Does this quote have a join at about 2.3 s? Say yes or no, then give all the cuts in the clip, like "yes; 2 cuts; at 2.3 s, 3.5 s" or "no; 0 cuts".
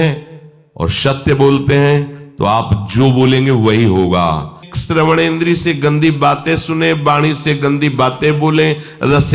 no; 1 cut; at 4.7 s